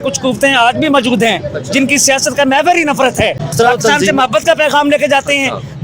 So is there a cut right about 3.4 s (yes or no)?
yes